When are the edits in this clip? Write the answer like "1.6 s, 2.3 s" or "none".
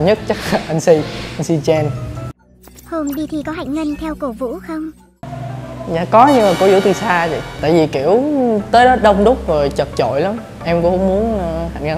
2.4 s